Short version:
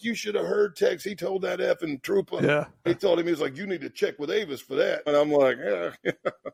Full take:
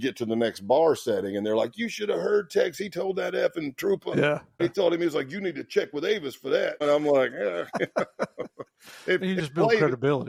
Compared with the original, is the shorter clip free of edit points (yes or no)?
yes